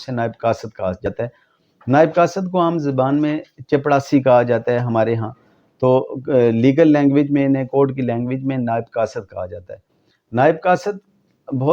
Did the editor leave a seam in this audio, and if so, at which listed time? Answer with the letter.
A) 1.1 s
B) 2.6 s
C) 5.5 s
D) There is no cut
A